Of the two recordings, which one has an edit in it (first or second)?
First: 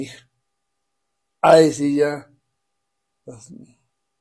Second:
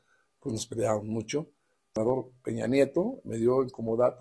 second